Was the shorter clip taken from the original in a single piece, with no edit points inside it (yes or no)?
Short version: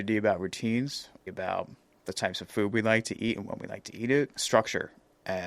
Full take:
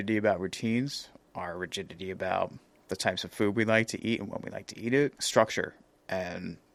no